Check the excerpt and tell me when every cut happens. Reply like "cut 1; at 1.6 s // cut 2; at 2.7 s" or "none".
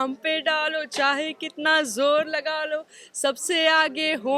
none